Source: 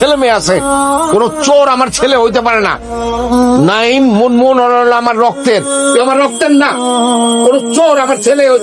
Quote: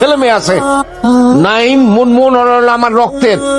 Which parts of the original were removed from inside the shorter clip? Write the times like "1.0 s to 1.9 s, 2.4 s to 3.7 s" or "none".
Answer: 0.9 s to 3.1 s